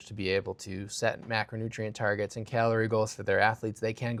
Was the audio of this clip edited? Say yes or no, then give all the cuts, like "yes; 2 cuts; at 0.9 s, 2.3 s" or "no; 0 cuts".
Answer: no; 0 cuts